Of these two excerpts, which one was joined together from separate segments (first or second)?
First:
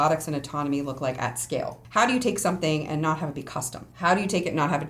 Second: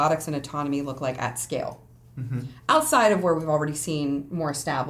first